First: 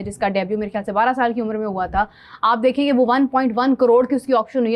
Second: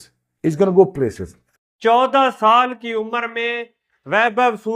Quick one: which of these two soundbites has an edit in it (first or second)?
second